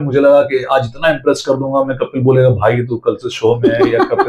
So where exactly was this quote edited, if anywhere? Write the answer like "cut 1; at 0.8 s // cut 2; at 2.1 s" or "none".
none